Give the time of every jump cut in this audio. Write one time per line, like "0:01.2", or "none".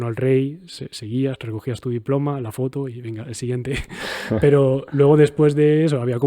none